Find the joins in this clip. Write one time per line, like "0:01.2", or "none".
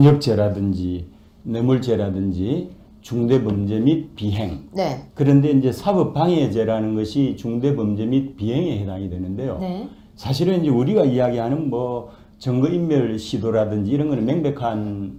none